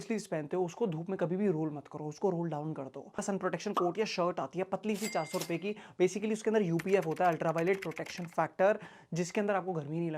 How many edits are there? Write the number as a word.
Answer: one